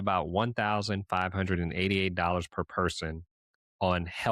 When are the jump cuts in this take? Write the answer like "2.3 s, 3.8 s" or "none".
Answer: none